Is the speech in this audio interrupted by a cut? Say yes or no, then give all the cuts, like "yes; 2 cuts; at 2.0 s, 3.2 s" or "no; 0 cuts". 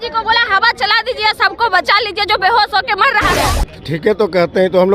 yes; 1 cut; at 3.3 s